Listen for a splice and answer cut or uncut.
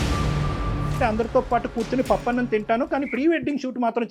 cut